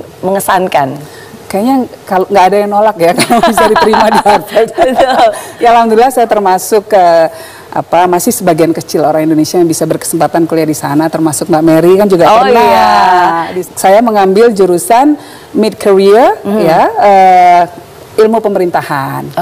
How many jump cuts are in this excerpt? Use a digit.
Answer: 0